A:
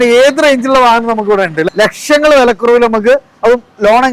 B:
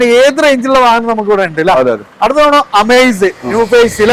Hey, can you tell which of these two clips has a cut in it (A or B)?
A